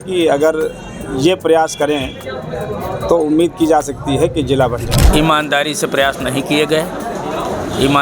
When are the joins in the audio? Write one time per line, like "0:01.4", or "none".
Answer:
0:05.0